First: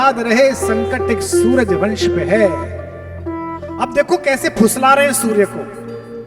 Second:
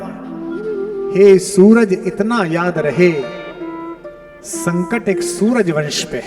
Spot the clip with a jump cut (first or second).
second